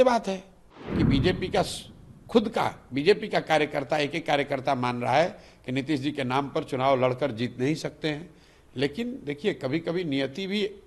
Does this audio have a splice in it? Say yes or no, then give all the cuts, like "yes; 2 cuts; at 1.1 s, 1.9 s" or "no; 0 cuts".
yes; 1 cut; at 1.0 s